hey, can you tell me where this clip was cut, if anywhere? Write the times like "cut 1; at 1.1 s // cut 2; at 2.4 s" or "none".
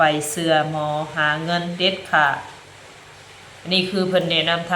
none